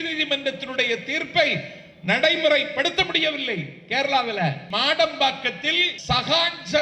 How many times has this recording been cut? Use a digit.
2